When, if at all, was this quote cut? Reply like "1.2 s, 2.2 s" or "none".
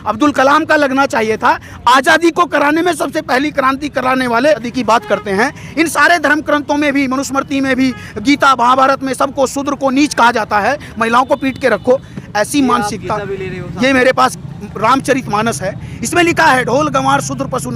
4.7 s